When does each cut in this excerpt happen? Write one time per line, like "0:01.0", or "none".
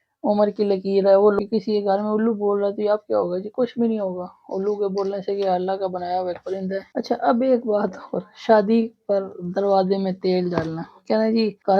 0:01.4